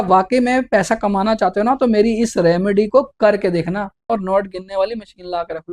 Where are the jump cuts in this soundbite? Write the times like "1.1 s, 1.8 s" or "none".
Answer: 4.1 s